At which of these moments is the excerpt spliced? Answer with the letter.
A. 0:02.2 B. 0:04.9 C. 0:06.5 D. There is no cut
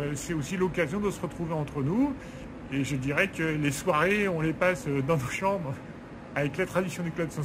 D